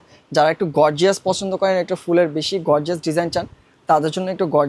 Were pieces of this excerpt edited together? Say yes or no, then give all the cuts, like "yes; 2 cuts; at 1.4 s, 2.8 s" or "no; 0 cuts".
no; 0 cuts